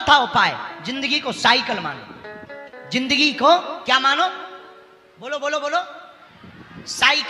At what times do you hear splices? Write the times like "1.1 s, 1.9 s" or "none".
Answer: none